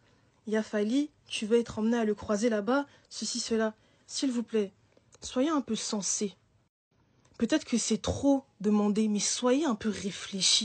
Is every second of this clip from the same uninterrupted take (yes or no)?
yes